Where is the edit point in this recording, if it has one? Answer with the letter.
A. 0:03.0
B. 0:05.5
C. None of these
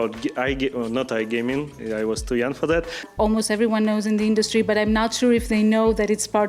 A